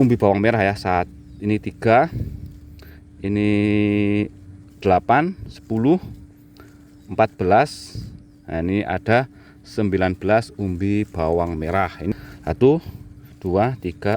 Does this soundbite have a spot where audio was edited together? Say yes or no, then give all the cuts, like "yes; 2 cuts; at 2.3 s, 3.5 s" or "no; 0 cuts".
yes; 1 cut; at 12.1 s